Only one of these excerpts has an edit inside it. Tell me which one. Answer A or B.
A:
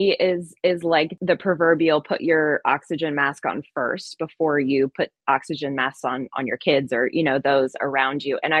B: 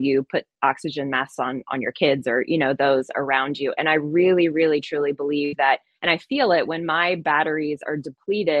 A